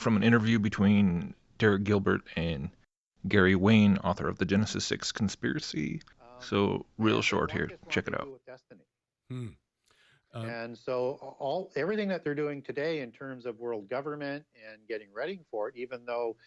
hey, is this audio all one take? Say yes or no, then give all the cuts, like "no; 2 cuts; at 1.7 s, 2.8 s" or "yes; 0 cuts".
yes; 0 cuts